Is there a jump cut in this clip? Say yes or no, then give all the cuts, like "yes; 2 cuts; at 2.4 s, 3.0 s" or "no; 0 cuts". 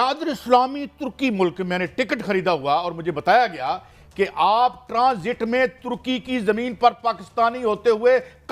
no; 0 cuts